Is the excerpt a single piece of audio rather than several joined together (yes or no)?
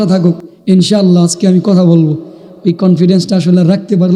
yes